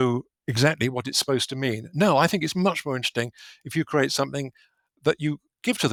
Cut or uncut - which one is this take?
uncut